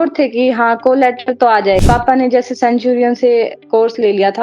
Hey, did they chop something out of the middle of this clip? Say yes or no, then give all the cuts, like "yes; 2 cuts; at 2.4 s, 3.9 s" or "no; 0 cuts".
yes; 1 cut; at 1.8 s